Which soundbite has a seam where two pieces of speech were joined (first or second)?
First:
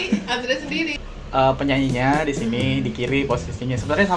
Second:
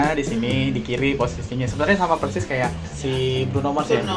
first